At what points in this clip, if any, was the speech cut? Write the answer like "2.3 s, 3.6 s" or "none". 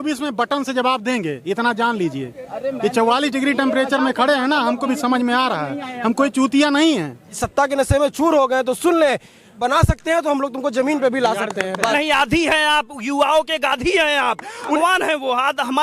7.3 s, 9.6 s, 11.9 s, 14.8 s